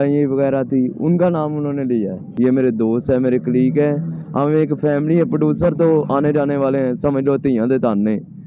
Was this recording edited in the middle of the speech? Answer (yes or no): yes